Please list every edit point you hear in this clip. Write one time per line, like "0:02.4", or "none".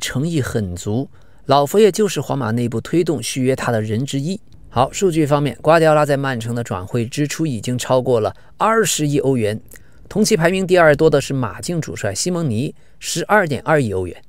0:04.5